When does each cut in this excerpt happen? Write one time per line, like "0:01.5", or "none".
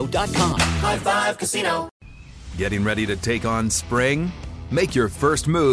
0:01.9